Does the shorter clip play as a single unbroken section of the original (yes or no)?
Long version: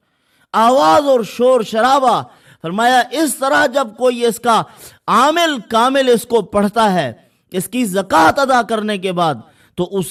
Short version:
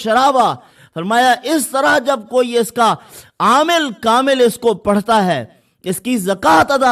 yes